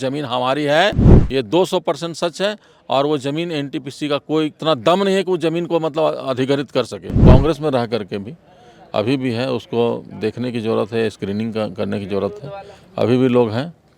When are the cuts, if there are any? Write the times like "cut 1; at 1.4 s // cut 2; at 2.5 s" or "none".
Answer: cut 1; at 4.6 s // cut 2; at 7.2 s